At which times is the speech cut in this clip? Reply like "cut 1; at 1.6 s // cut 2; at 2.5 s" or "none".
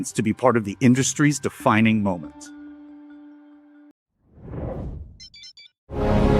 cut 1; at 3.9 s